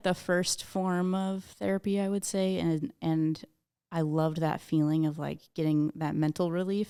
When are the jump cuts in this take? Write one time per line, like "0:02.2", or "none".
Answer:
none